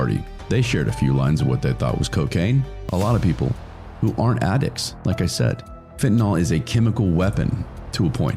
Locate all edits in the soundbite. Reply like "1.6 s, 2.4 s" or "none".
2.8 s